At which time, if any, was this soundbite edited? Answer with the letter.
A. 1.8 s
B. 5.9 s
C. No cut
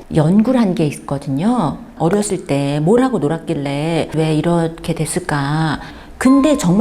B